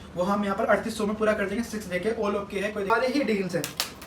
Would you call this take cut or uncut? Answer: cut